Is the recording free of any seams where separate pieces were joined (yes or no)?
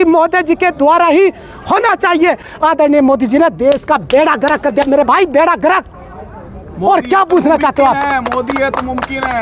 no